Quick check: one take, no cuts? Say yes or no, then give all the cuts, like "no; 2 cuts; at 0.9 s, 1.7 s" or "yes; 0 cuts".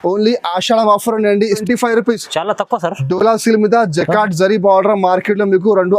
no; 1 cut; at 1.6 s